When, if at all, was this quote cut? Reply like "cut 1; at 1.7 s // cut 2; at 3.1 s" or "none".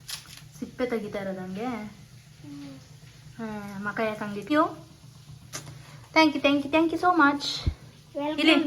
cut 1; at 4.5 s